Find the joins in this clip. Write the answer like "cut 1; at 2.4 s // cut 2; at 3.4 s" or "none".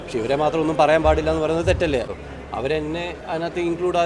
cut 1; at 2.1 s